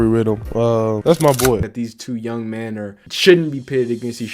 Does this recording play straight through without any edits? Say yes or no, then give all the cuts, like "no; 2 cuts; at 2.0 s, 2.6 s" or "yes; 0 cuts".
no; 2 cuts; at 1.8 s, 3.0 s